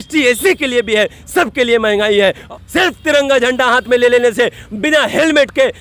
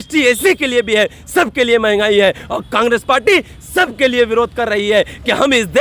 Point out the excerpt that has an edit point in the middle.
first; 1 cut; at 2.5 s

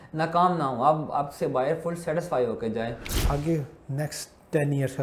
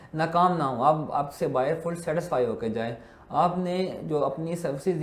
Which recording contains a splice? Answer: first; 1 cut; at 3.1 s

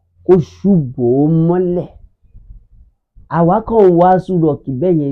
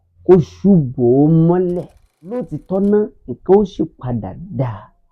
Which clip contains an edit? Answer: second; 1 cut; at 2.5 s

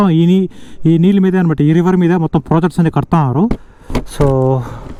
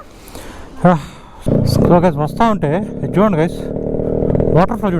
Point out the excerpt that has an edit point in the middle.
second; 1 cut; at 1.4 s

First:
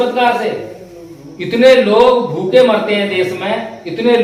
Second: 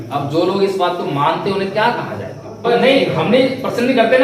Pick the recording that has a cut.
second; 1 cut; at 2.6 s

